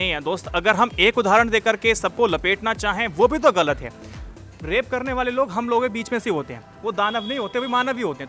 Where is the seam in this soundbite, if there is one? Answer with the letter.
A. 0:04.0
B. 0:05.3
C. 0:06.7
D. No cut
D